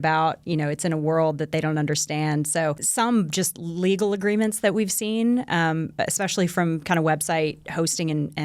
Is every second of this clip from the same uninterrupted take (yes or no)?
no